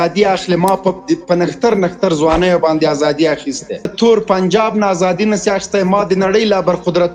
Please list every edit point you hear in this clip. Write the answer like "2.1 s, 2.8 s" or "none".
3.9 s